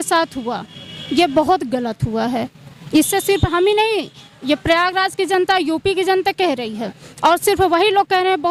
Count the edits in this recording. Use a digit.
0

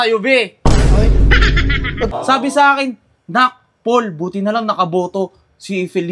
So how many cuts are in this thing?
1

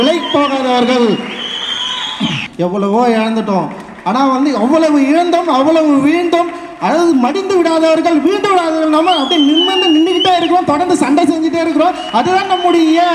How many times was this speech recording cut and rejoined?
1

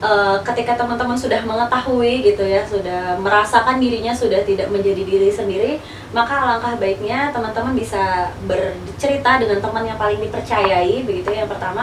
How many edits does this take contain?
0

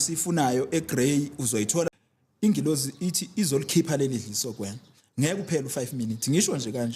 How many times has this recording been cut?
1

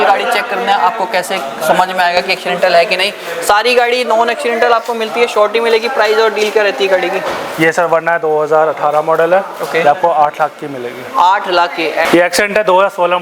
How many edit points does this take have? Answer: 0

